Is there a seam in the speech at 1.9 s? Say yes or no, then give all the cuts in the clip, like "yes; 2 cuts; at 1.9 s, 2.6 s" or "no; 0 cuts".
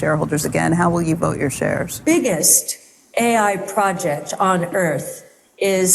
yes; 1 cut; at 1.9 s